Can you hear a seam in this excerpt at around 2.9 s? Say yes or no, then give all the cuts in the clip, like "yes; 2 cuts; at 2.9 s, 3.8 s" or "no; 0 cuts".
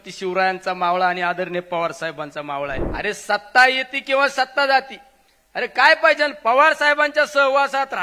yes; 1 cut; at 2.9 s